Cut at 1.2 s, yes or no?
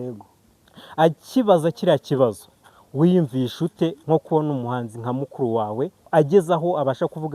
no